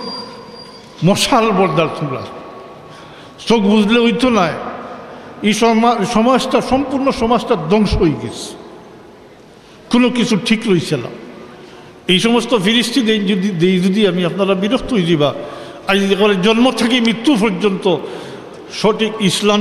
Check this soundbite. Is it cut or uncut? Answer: uncut